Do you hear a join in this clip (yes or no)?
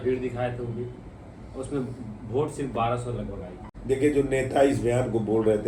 yes